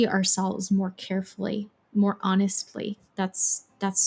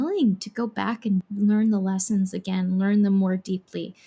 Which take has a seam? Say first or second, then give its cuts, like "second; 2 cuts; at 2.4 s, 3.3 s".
second; 1 cut; at 1.3 s